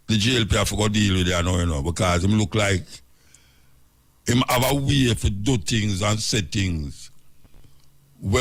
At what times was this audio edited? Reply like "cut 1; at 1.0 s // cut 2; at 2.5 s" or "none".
none